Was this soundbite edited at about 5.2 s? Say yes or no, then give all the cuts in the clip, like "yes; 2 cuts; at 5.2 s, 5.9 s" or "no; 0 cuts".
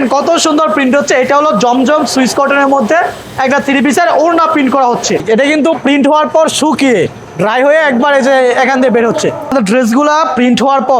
yes; 2 cuts; at 5.2 s, 9.5 s